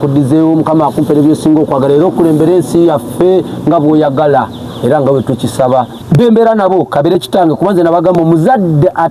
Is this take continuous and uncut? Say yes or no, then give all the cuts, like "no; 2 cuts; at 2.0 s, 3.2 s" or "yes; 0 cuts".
no; 1 cut; at 6.0 s